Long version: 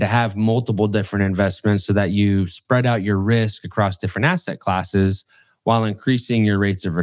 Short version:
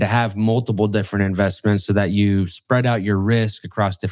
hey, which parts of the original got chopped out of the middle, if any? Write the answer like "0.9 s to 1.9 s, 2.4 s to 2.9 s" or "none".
none